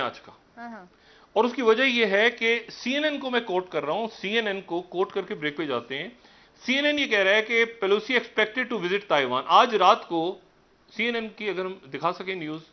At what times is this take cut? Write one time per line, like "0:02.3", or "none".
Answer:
none